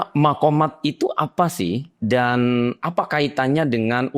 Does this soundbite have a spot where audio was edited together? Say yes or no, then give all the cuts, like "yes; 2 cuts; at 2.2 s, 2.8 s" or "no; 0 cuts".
no; 0 cuts